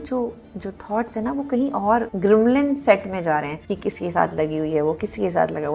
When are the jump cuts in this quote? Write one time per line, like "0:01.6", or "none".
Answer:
0:02.1
0:03.6